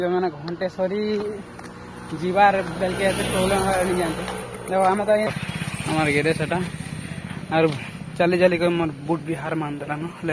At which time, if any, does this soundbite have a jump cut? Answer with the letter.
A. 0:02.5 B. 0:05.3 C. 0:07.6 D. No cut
B